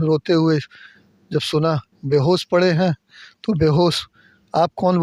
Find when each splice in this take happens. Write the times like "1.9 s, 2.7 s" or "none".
none

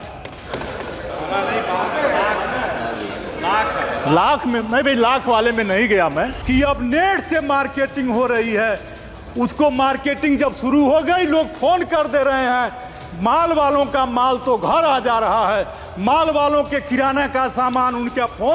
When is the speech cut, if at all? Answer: 6.4 s

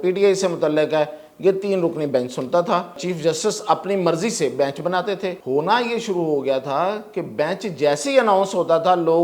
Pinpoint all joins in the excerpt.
3.1 s, 5.4 s

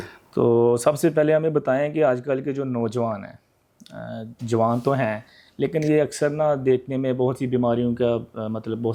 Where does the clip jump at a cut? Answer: none

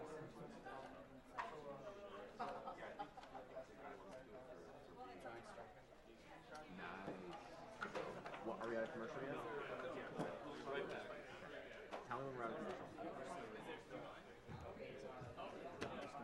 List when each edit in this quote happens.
none

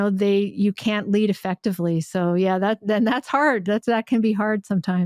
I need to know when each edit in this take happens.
none

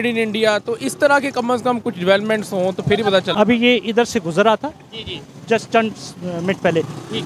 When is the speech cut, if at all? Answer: 3.3 s

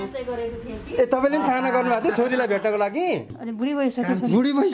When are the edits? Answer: 3.5 s

